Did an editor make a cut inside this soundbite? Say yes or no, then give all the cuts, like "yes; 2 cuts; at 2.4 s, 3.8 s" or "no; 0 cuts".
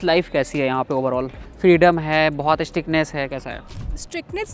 no; 0 cuts